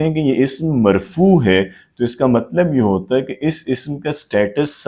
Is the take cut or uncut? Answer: uncut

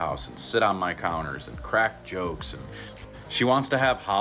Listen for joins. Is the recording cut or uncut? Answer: cut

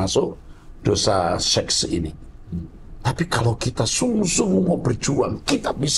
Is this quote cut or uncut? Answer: uncut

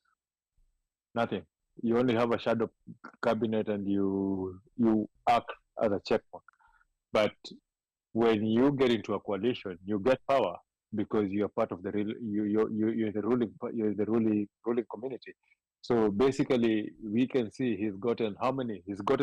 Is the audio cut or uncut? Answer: uncut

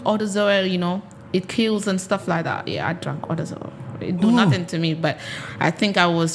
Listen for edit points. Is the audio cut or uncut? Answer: uncut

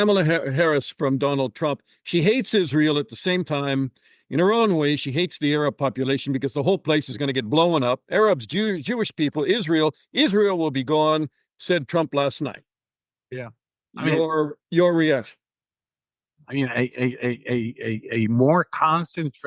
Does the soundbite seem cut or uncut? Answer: uncut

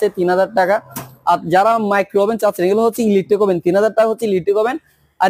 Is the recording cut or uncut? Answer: uncut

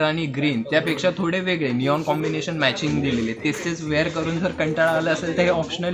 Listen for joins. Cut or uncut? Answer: uncut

